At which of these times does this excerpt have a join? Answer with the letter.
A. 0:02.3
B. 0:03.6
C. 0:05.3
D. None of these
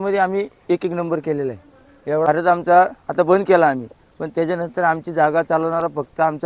A